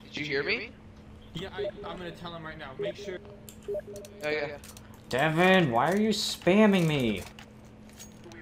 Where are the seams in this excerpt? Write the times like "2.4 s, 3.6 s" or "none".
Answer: none